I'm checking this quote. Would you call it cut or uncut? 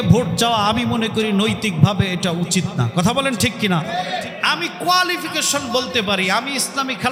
uncut